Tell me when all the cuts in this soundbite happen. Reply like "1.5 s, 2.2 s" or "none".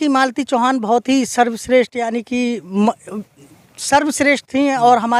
none